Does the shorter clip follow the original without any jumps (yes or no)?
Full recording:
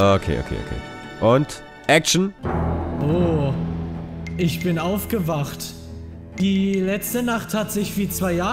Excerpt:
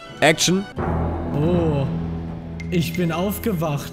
yes